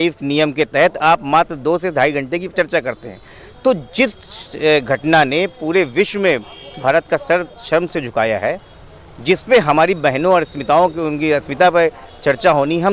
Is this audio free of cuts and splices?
yes; 0 cuts

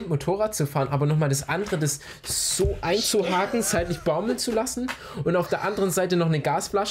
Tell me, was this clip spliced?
no; 0 cuts

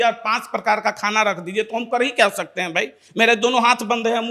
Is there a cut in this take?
no; 0 cuts

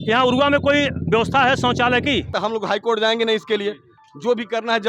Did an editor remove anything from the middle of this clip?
yes; 1 cut; at 2.3 s

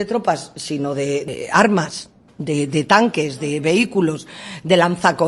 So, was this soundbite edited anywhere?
yes; 1 cut; at 1.3 s

